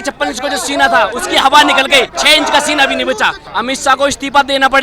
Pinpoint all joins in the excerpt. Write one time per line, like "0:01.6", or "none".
0:03.4